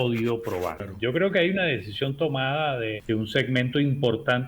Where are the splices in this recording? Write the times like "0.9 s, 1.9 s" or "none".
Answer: 0.9 s, 3.0 s